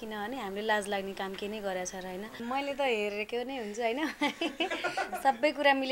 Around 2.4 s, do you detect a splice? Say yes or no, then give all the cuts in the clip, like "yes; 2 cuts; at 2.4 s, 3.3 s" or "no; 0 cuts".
yes; 1 cut; at 2.4 s